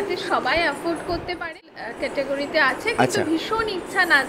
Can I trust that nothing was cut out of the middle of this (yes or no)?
no